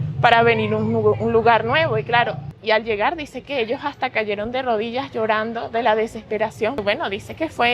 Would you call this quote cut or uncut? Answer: cut